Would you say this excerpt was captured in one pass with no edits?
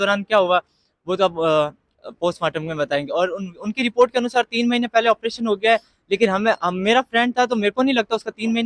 yes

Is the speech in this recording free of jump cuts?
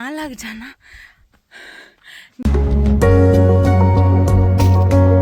no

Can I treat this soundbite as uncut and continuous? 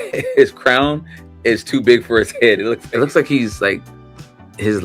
no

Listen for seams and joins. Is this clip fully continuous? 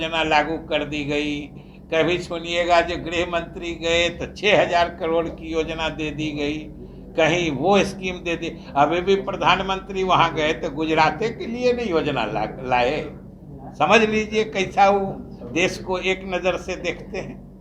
yes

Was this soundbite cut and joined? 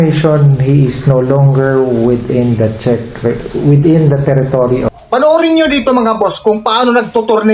yes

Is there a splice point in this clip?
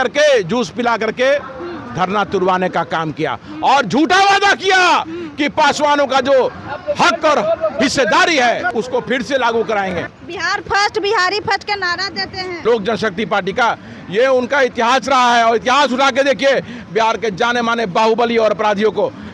yes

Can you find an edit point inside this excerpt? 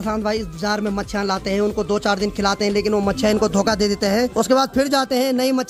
no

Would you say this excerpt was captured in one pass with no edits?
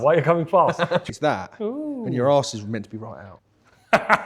no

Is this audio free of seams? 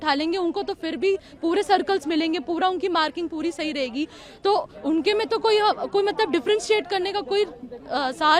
yes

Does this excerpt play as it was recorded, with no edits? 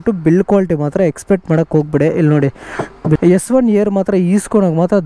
no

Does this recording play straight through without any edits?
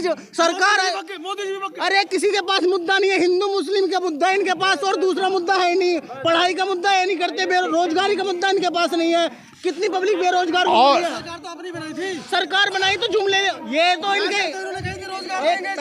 yes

